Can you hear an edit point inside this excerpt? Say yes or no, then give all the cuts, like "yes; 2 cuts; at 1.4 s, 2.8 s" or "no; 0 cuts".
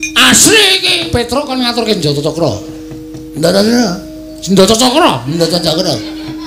yes; 1 cut; at 1.3 s